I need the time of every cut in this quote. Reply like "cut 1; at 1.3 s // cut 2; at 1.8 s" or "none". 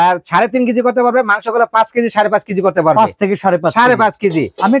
none